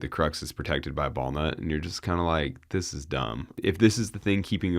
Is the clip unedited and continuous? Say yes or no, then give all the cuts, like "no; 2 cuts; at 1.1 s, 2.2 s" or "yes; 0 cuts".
no; 1 cut; at 3.5 s